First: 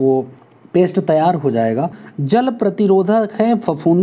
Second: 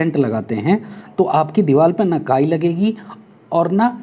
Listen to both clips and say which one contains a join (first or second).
first